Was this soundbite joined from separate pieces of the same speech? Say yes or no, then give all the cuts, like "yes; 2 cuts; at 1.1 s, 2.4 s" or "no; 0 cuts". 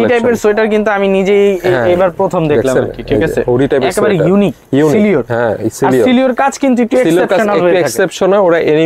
no; 0 cuts